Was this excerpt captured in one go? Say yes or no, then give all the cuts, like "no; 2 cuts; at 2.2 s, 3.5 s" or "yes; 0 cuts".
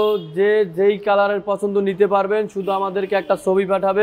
yes; 0 cuts